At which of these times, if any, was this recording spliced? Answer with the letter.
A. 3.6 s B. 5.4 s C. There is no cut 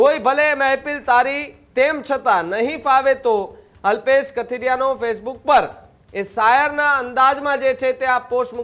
C